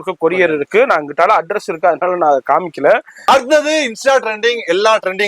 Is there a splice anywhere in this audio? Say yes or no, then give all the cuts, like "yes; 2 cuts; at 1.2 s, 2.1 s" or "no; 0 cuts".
yes; 1 cut; at 3.2 s